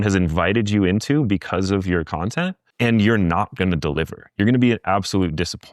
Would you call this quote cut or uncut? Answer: cut